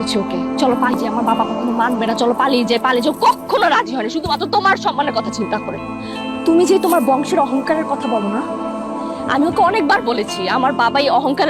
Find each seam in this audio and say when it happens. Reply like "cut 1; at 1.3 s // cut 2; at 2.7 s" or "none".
cut 1; at 0.9 s